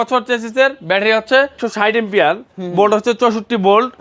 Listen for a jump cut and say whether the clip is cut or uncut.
cut